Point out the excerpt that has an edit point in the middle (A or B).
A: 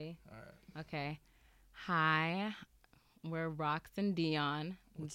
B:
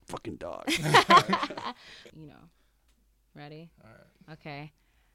B